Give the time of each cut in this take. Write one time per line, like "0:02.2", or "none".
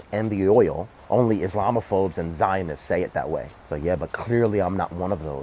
0:00.9
0:03.6

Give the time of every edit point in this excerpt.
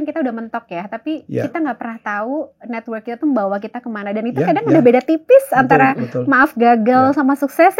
none

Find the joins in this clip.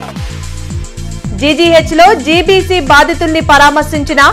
none

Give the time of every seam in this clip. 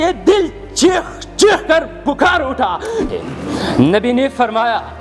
0:03.0

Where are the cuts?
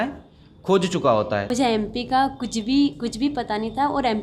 0:01.5

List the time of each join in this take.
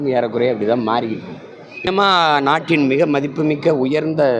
0:01.9

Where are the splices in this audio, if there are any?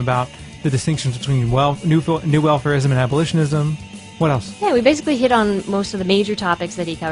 0:02.8

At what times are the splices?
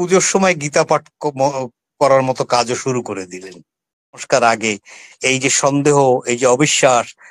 0:04.2

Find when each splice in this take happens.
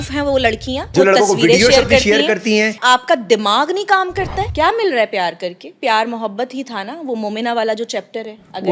0:00.9
0:02.8
0:04.5
0:05.7

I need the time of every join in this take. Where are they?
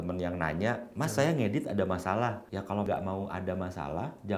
0:02.8

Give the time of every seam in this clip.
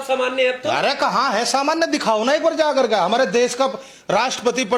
none

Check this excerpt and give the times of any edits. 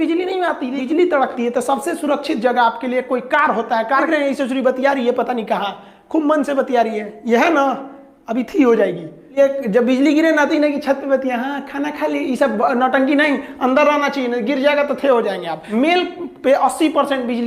0:00.8
0:04.1
0:09.3
0:15.6

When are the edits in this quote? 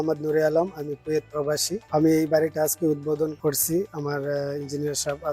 0:01.8
0:03.4

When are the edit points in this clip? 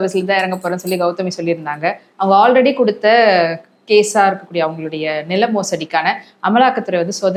none

